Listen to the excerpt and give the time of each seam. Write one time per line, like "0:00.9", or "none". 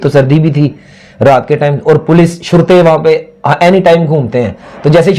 none